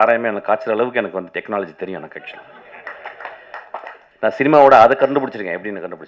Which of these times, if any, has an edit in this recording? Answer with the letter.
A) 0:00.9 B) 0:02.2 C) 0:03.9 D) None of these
D